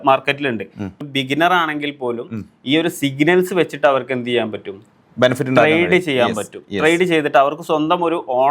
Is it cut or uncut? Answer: cut